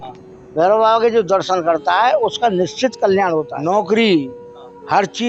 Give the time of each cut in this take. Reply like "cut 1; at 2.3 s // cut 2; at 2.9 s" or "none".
cut 1; at 3.5 s